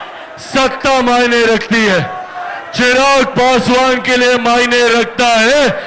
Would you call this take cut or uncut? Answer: uncut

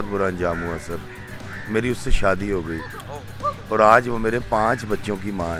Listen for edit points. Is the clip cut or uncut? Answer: uncut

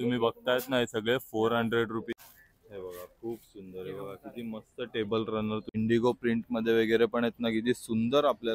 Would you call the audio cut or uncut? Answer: cut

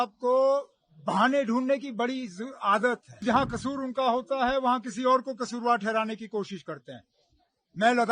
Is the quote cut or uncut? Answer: cut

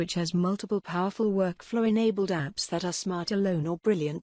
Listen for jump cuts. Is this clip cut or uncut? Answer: uncut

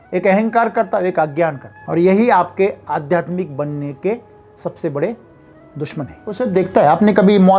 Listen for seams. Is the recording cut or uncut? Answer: cut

